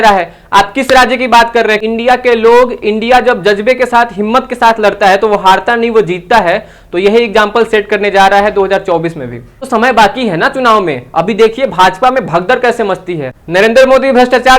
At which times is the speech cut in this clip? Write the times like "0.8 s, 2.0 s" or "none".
1.8 s, 9.6 s, 13.3 s